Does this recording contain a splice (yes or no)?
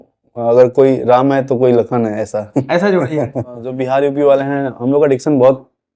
yes